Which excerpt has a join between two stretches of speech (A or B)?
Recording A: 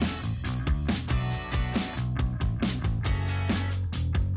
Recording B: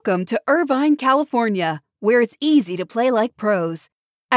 A